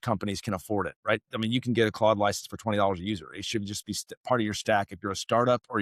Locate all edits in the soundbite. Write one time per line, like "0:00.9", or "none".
none